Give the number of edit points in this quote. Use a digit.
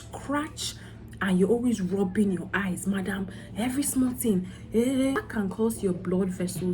1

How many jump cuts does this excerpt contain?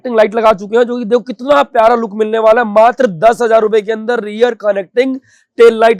0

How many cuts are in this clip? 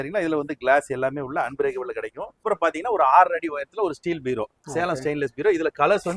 1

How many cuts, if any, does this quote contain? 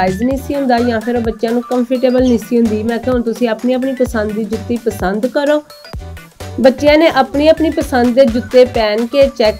1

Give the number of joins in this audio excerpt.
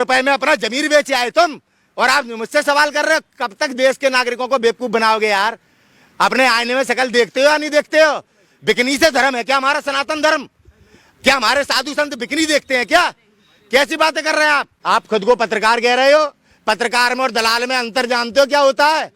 1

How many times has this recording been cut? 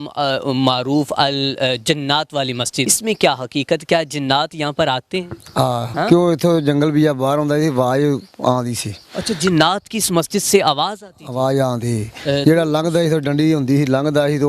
2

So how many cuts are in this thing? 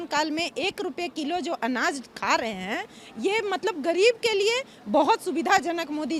0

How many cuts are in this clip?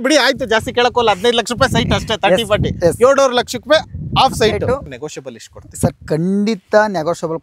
1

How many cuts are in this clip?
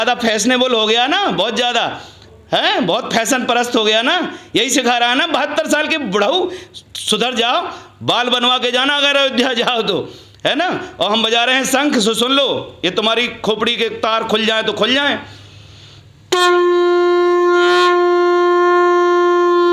0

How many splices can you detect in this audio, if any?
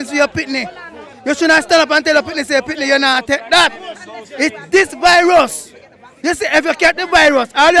0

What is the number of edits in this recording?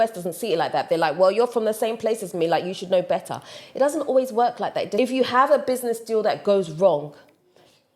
1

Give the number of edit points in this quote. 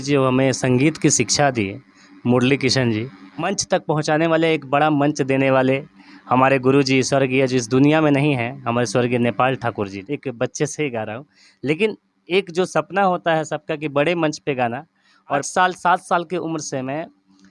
3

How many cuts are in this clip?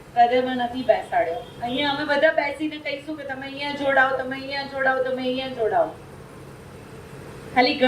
1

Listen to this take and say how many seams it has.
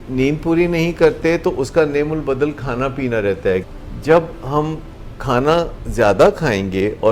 1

